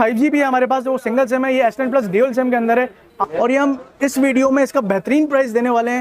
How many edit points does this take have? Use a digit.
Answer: 1